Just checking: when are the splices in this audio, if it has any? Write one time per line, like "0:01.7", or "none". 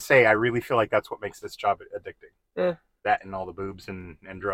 none